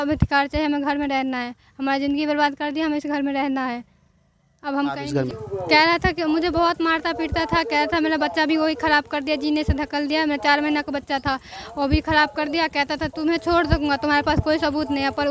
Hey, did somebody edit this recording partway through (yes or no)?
yes